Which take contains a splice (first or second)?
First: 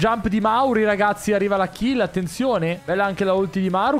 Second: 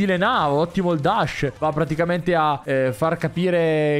first